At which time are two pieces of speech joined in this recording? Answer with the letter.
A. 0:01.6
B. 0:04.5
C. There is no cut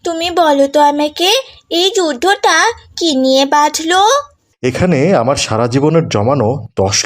B